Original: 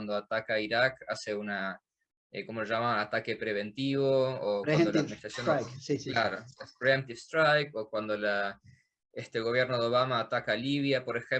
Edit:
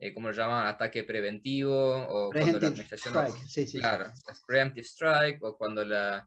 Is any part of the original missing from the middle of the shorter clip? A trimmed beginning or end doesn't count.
no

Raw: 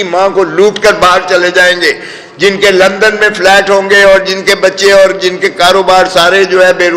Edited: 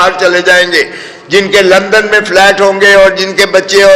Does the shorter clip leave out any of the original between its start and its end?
no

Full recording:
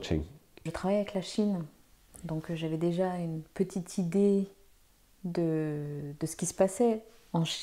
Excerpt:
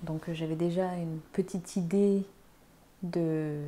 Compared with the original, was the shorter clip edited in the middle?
no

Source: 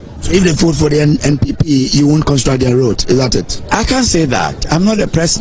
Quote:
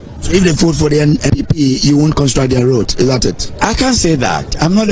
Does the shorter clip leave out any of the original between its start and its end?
yes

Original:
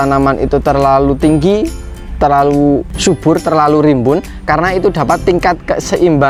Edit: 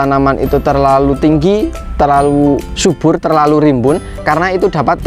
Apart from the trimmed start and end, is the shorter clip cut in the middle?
yes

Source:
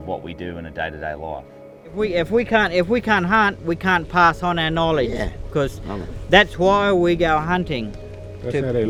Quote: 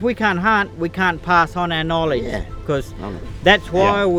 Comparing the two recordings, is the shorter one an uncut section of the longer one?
yes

